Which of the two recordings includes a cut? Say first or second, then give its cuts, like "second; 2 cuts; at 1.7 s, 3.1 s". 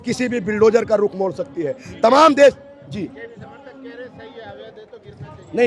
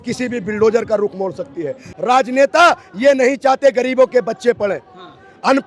second; 1 cut; at 1.9 s